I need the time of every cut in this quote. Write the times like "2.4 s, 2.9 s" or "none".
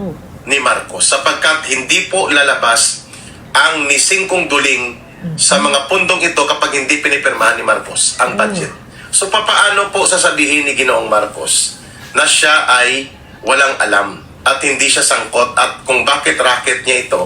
9.0 s